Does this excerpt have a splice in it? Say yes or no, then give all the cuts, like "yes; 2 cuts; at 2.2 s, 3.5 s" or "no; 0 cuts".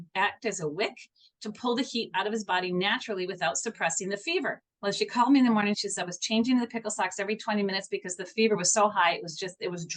yes; 2 cuts; at 4.7 s, 5.8 s